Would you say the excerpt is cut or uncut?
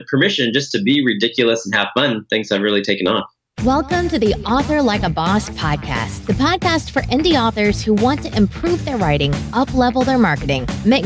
cut